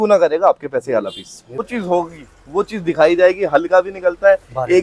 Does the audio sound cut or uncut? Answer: cut